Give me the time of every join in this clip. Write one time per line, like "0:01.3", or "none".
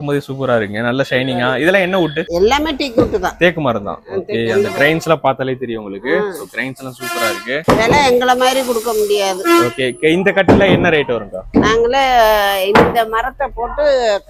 none